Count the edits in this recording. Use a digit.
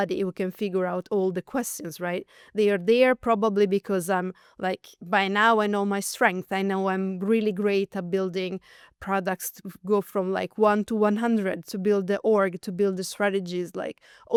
0